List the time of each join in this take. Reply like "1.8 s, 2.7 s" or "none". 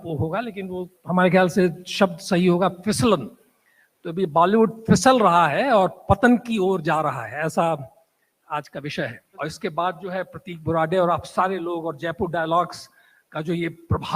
9.2 s